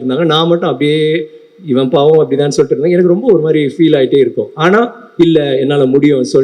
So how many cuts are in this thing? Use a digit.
0